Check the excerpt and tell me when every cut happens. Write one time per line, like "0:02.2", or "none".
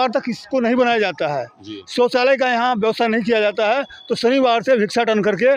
none